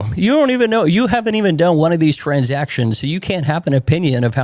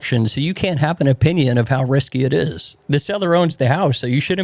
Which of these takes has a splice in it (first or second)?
second